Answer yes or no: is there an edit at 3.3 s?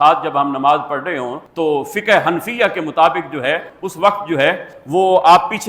no